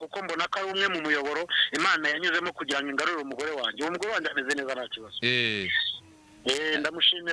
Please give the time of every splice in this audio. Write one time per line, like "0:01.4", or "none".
none